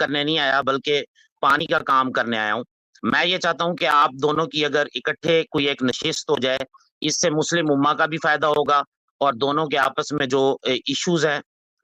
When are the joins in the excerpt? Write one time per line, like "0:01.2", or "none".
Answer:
none